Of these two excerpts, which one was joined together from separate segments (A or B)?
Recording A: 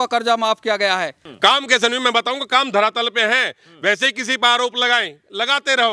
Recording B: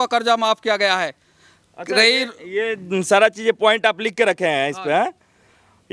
A